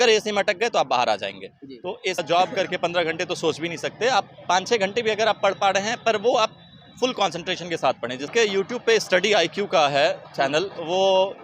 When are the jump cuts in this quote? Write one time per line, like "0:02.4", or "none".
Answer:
0:02.2
0:08.3